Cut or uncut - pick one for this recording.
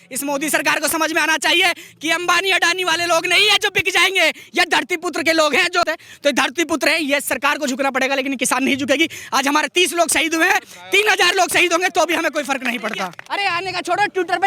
cut